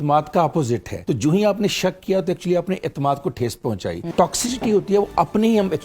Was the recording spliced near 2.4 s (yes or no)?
no